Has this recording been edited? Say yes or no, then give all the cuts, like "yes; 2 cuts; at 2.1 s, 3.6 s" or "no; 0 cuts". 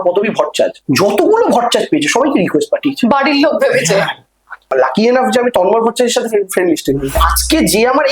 yes; 2 cuts; at 4.6 s, 7.2 s